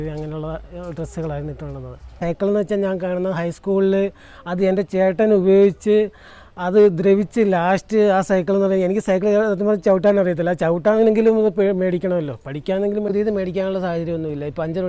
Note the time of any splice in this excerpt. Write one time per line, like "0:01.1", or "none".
0:02.2
0:13.1